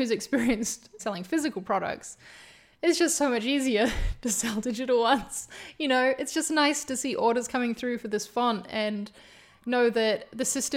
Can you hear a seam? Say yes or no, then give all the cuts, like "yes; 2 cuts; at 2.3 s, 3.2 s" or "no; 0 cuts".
yes; 1 cut; at 1.0 s